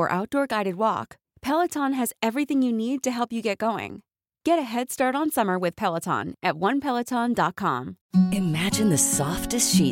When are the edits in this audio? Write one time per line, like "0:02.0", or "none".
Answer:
0:08.0